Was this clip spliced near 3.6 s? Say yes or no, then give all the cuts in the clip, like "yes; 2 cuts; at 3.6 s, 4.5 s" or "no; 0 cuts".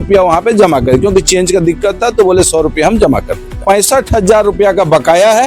yes; 1 cut; at 3.6 s